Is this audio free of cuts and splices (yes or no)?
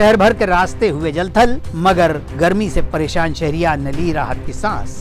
yes